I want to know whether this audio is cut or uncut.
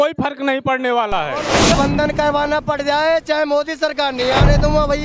cut